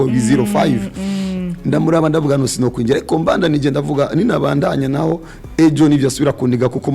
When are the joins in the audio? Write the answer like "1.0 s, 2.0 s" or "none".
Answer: none